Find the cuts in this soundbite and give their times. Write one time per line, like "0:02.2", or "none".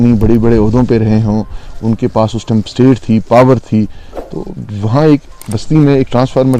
none